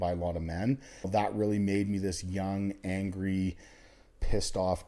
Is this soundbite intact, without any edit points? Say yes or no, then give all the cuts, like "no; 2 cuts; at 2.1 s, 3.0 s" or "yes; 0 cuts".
no; 1 cut; at 1.1 s